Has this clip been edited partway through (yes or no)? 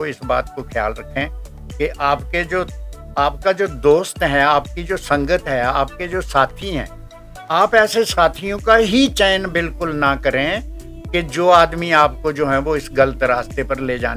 no